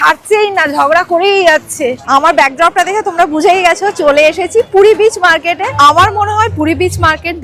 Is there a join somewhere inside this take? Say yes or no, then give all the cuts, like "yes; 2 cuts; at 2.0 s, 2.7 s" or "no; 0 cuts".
yes; 2 cuts; at 2.0 s, 5.7 s